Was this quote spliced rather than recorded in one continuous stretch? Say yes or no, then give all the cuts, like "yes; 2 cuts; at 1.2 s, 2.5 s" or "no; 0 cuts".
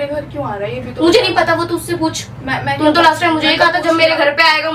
no; 0 cuts